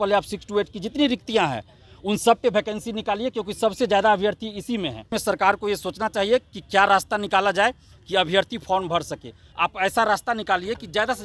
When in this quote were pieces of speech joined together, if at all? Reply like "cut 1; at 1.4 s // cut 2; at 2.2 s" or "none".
cut 1; at 5.1 s // cut 2; at 9.4 s